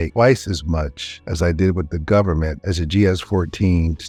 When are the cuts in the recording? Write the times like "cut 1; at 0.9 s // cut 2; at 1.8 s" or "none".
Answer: none